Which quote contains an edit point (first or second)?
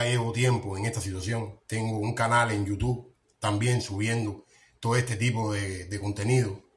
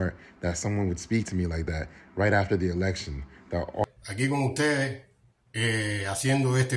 second